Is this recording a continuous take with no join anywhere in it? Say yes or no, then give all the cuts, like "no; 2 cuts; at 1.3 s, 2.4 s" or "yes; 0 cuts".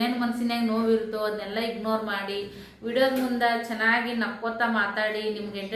yes; 0 cuts